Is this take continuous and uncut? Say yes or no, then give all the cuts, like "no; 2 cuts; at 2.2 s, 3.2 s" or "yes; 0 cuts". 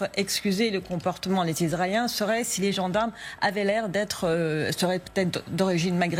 yes; 0 cuts